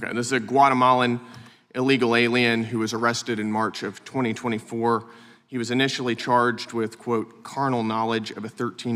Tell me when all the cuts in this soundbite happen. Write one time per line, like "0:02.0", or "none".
none